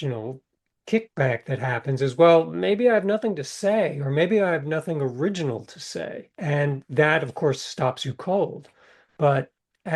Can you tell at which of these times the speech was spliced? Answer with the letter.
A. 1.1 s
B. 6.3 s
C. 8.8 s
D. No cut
B